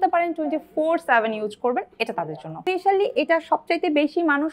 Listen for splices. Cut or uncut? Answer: cut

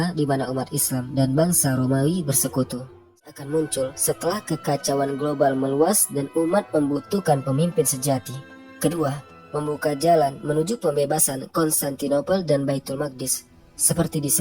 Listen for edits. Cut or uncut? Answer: cut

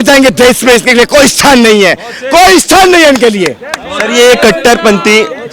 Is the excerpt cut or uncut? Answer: uncut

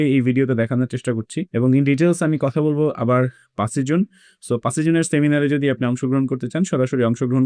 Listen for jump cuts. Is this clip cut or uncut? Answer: cut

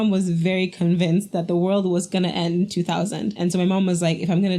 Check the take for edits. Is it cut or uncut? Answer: cut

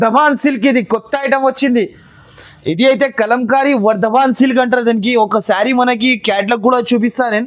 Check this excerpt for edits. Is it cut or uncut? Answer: uncut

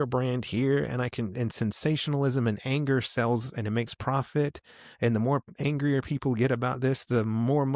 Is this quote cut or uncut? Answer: uncut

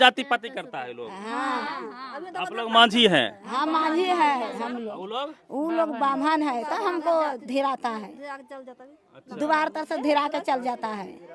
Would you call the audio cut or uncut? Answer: uncut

